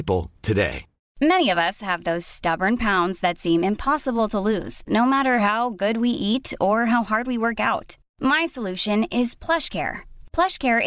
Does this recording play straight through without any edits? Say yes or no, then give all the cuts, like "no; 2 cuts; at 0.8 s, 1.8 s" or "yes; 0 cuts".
no; 1 cut; at 1.0 s